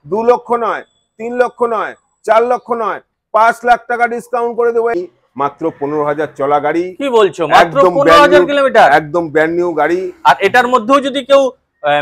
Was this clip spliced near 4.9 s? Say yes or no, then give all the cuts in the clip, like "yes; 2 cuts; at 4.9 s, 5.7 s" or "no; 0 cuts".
yes; 1 cut; at 4.9 s